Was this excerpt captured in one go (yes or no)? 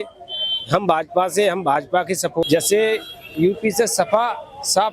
no